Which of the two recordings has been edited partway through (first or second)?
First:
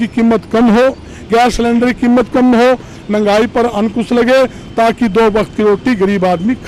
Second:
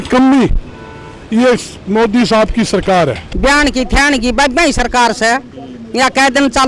second